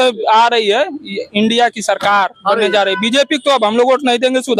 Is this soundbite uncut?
yes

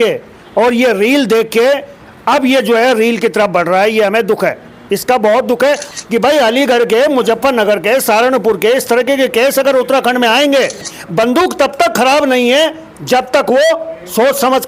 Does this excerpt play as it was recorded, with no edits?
no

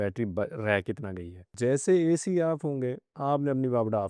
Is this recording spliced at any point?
yes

